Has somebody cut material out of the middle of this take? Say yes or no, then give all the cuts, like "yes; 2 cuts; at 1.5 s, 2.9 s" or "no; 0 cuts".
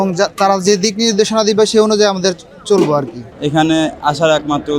yes; 1 cut; at 3.3 s